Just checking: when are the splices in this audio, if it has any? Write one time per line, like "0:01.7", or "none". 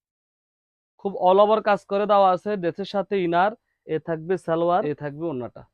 0:03.7
0:04.9